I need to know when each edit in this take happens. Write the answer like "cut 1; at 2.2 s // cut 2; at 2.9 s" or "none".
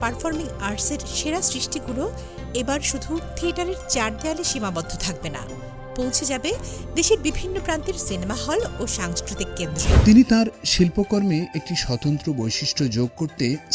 cut 1; at 9.9 s